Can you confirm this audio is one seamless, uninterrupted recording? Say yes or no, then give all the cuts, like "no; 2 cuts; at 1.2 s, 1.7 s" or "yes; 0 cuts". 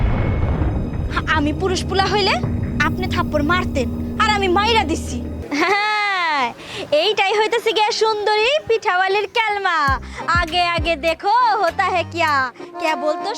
no; 1 cut; at 5.3 s